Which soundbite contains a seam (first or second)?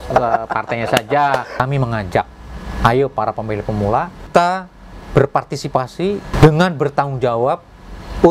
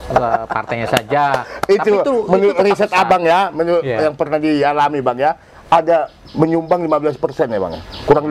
first